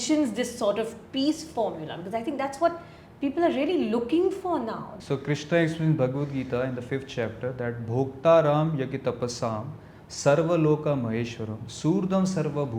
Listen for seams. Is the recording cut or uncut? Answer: uncut